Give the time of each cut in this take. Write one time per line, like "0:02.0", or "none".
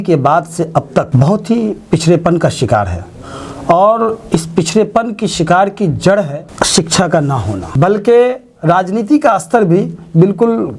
0:07.6